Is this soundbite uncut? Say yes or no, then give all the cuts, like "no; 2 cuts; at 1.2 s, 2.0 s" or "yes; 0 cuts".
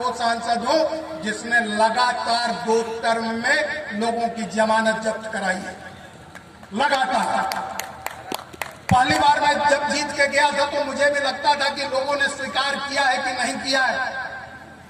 yes; 0 cuts